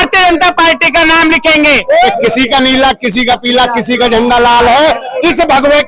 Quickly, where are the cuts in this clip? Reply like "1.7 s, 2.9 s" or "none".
2.1 s